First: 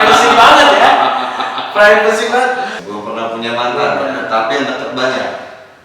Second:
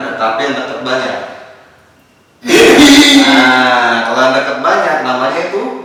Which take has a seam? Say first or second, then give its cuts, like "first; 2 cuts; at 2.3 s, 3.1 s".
first; 1 cut; at 2.8 s